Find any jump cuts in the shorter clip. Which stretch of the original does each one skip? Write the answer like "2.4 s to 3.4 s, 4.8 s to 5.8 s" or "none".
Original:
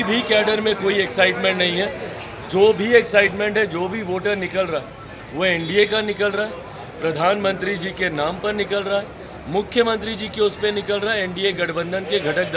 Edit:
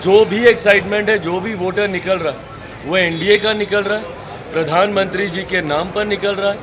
none